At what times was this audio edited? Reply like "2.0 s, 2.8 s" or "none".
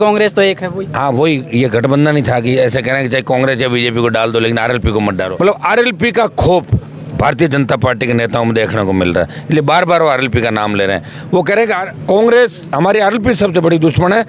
5.3 s, 11.9 s